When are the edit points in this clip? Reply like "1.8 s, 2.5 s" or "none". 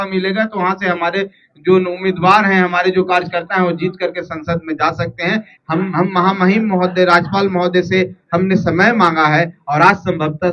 5.5 s